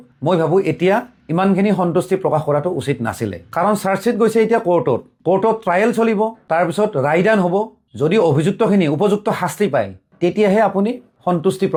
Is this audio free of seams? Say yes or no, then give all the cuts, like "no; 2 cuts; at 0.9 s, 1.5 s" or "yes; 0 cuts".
yes; 0 cuts